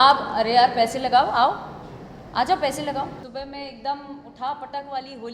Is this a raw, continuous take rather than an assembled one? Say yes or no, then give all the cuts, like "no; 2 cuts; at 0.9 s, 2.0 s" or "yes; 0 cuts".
no; 1 cut; at 3.2 s